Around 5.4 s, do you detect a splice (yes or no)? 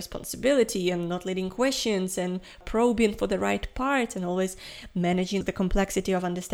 yes